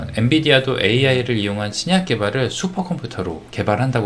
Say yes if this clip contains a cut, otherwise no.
no